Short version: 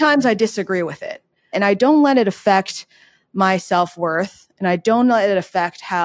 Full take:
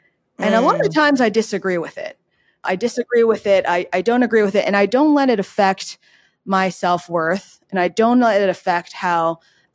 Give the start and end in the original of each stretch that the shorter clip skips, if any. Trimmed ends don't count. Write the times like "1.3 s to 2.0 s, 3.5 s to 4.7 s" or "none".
2.5 s to 4.7 s

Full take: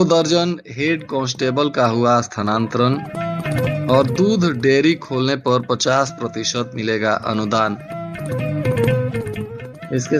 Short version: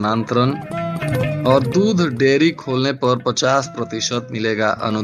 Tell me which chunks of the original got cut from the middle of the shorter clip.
none

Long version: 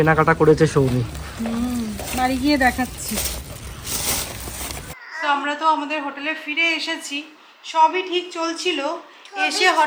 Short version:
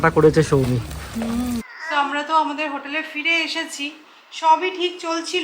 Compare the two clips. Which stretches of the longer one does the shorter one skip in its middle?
2.0 s to 5.0 s

